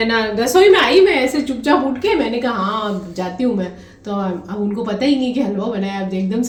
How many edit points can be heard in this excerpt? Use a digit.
0